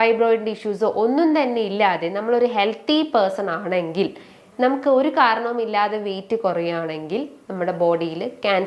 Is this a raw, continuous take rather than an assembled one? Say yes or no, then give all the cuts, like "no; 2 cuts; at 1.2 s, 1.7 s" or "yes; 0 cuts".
yes; 0 cuts